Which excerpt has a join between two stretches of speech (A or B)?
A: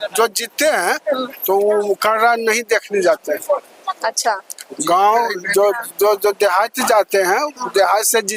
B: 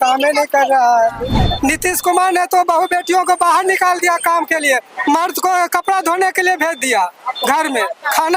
B